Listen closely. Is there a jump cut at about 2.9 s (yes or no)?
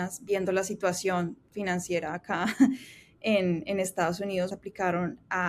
no